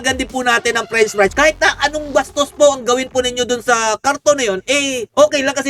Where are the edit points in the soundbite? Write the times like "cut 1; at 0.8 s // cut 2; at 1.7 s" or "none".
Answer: none

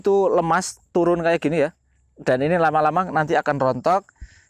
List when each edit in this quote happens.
none

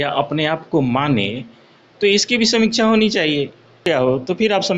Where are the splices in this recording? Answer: cut 1; at 3.9 s

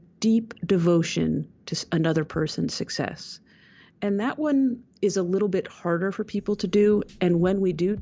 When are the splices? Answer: none

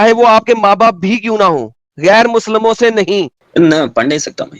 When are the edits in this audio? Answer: cut 1; at 3.4 s

